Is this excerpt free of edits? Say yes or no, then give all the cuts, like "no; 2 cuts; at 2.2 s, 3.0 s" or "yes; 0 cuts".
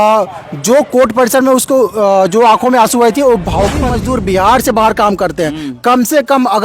no; 1 cut; at 3.8 s